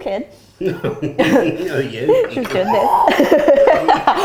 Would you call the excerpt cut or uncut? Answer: uncut